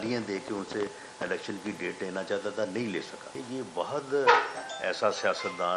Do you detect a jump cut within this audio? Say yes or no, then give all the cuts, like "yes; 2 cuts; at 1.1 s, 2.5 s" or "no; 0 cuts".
yes; 1 cut; at 3.4 s